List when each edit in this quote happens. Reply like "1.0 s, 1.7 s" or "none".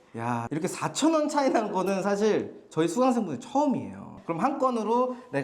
4.1 s